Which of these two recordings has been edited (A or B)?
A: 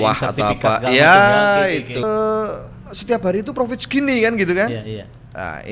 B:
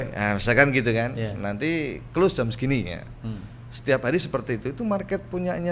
A